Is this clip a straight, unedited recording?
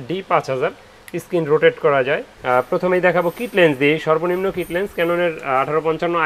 no; 1 cut; at 2.3 s

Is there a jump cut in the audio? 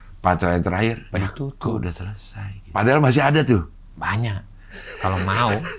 yes; 2 cuts; at 1.0 s, 2.8 s

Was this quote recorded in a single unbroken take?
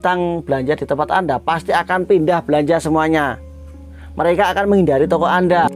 yes; 0 cuts

